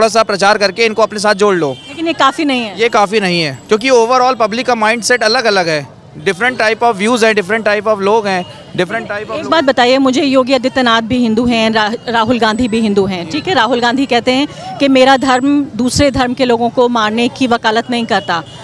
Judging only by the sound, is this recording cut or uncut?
uncut